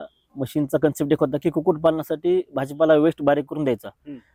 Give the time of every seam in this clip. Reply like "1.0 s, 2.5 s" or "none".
none

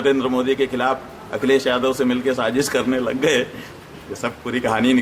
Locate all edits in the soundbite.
none

